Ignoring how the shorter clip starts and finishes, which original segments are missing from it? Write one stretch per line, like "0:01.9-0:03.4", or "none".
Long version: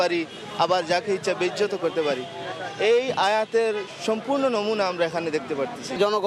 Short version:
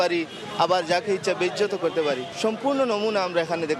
0:02.3-0:03.9